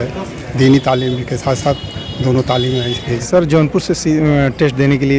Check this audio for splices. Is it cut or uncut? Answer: cut